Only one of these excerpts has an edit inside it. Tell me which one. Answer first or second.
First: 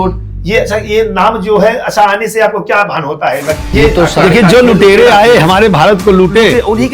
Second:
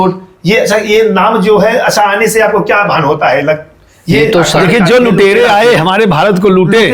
first